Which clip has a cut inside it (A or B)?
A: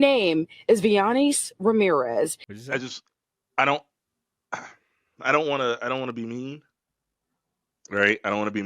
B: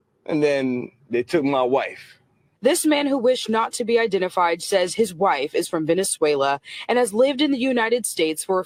A